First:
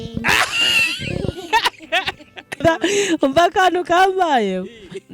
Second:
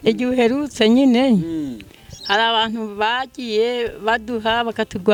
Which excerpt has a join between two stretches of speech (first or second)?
first